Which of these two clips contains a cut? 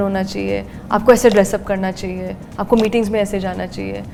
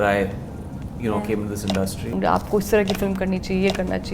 second; 1 cut; at 2.1 s

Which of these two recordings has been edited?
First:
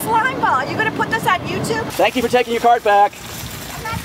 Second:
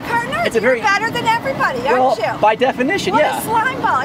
first; 1 cut; at 1.9 s

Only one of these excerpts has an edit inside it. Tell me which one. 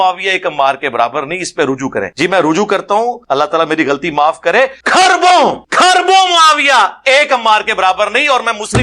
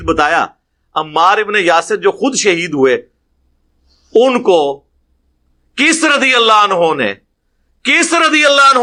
first; 4 cuts; at 2.1 s, 3.2 s, 4.8 s, 5.6 s

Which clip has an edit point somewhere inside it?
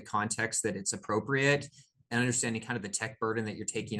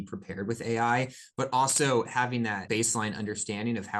second; 1 cut; at 2.6 s

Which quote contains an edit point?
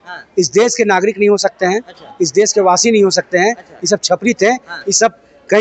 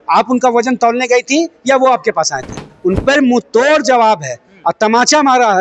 second; 1 cut; at 2.7 s

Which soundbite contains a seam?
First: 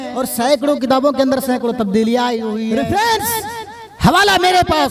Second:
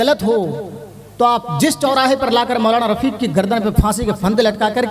first; 1 cut; at 2.7 s

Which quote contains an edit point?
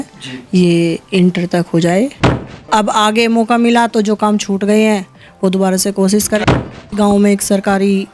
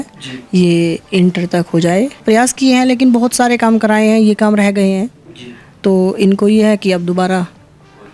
first; 2 cuts; at 2.2 s, 6.7 s

